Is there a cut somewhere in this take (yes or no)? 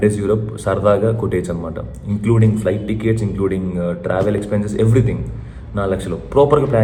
no